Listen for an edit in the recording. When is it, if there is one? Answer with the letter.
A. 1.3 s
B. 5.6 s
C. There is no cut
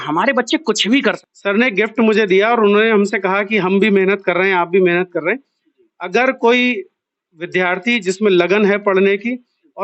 A